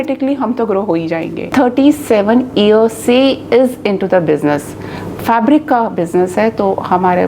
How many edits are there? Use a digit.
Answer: 1